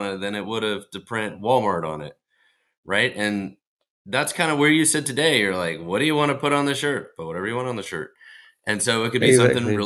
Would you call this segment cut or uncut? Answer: uncut